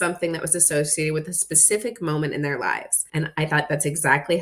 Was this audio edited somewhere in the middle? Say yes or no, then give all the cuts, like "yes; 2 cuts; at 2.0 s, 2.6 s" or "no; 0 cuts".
yes; 1 cut; at 2.9 s